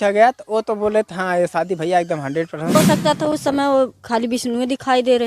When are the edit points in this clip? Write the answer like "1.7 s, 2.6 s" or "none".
2.8 s